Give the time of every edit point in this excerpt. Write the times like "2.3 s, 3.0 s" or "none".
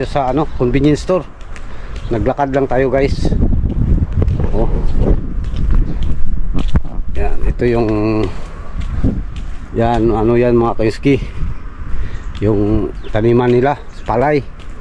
none